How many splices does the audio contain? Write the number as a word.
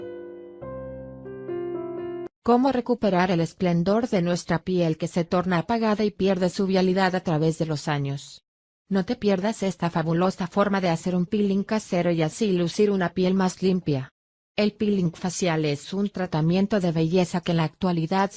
zero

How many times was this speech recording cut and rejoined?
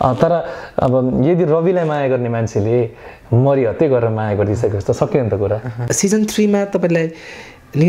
one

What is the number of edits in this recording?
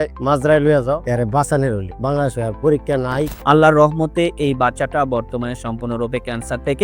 two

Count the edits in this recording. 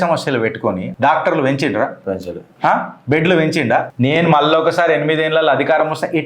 one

